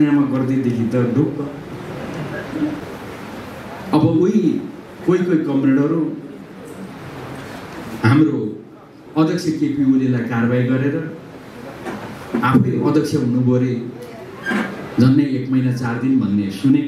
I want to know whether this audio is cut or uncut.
cut